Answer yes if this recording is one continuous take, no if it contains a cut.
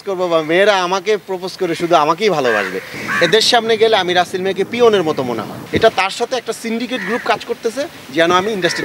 no